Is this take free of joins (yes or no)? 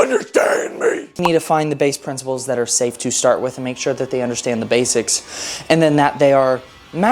no